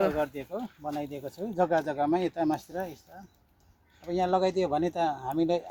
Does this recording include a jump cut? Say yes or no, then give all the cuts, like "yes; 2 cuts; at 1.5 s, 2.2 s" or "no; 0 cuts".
no; 0 cuts